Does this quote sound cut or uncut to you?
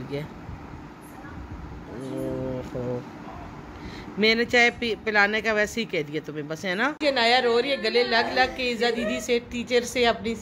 cut